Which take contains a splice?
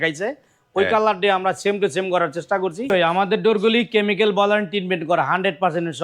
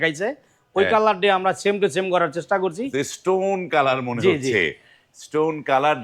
first; 1 cut; at 2.9 s

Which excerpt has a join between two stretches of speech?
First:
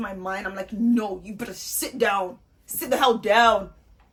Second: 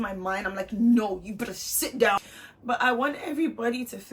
second; 1 cut; at 2.2 s

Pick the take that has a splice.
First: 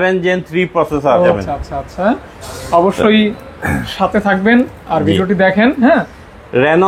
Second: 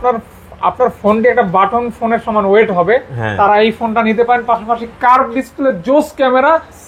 first; 1 cut; at 1.3 s

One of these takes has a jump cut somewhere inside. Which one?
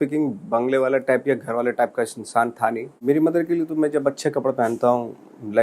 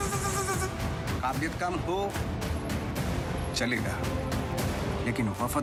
first; 1 cut; at 2.9 s

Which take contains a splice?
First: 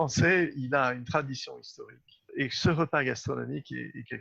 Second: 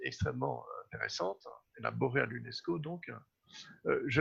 first; 1 cut; at 2.3 s

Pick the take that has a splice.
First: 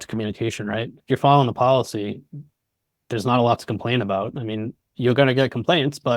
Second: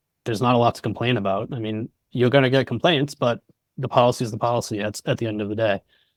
first; 1 cut; at 1.0 s

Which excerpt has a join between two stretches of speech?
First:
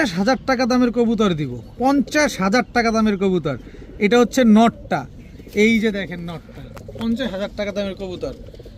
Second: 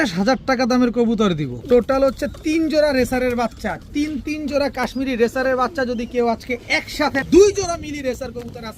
second; 2 cuts; at 1.5 s, 7.2 s

